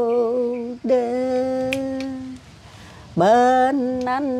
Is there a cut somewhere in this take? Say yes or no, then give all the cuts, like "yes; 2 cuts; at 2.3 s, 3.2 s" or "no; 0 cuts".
no; 0 cuts